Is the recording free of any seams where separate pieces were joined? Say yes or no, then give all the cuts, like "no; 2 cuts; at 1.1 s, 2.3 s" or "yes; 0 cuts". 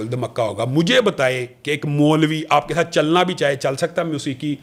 yes; 0 cuts